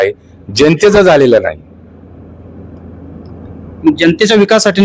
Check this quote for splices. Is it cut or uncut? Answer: uncut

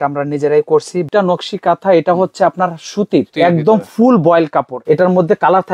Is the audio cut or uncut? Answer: cut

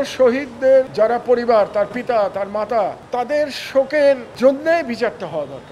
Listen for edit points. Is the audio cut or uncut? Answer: cut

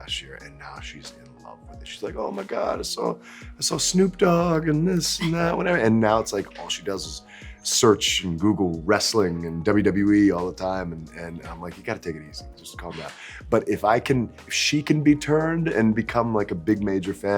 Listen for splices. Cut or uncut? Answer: uncut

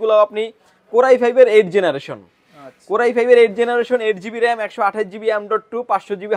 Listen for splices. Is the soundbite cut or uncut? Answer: uncut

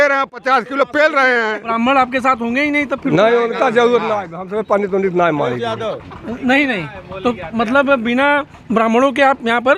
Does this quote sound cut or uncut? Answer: cut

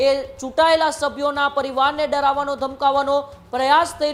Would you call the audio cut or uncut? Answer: uncut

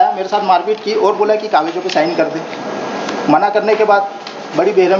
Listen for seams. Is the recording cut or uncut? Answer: uncut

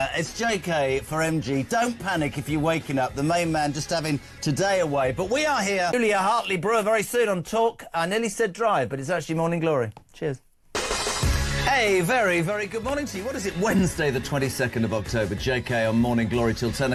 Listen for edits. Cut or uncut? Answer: uncut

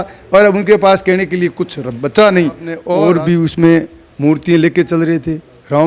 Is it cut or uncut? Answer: cut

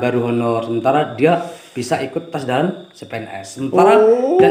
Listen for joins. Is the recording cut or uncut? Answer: uncut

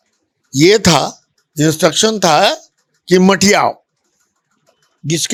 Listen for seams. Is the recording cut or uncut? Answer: uncut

